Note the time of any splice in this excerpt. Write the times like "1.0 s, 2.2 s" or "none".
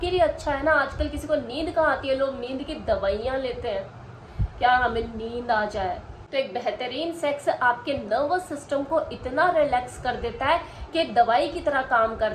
none